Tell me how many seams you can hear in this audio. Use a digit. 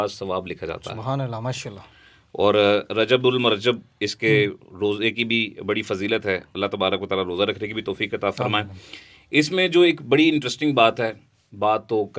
0